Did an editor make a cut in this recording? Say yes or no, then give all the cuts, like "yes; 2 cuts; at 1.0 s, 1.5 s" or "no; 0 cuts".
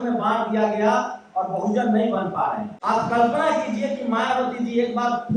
yes; 1 cut; at 2.7 s